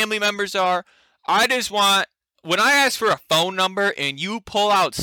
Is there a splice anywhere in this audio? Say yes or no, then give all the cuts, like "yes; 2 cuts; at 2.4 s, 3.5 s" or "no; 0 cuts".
no; 0 cuts